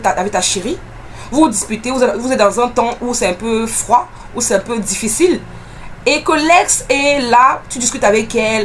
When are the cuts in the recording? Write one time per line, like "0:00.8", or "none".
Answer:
none